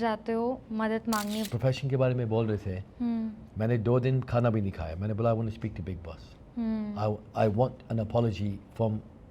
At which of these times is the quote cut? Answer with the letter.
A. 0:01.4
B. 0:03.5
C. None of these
A